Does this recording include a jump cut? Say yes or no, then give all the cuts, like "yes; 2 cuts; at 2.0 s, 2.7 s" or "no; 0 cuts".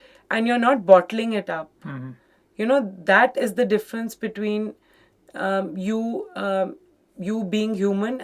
no; 0 cuts